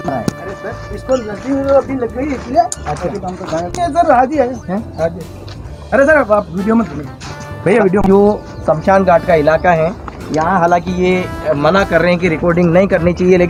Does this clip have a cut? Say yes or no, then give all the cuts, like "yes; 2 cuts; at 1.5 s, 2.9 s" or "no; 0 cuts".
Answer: no; 0 cuts